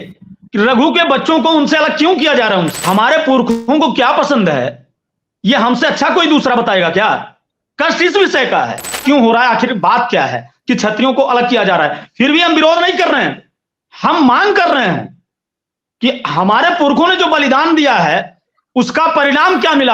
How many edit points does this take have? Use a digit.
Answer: 2